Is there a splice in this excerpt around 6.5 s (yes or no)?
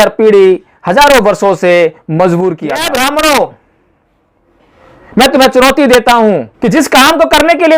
yes